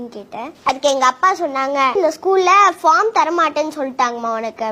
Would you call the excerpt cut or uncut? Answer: cut